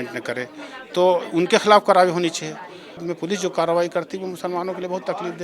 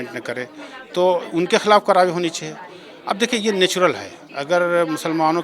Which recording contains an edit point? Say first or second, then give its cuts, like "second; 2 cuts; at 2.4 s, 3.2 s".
first; 1 cut; at 3.0 s